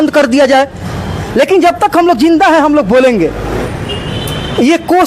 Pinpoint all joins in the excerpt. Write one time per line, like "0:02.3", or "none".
0:03.5